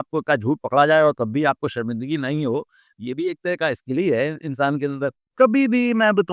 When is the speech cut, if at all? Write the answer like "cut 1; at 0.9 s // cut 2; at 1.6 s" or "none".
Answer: cut 1; at 5.2 s